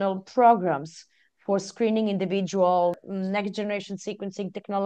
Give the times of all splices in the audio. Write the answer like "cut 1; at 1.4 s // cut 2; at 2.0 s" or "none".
cut 1; at 3.1 s